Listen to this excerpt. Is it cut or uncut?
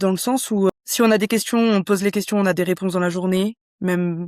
uncut